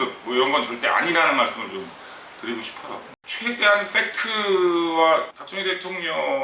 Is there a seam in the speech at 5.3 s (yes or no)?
no